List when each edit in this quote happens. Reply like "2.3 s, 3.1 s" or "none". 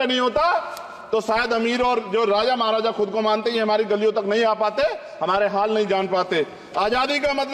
none